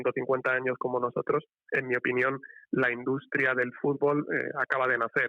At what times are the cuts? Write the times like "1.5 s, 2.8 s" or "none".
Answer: 1.6 s